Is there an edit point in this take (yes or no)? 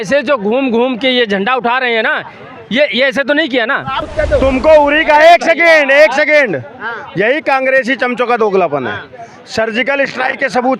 yes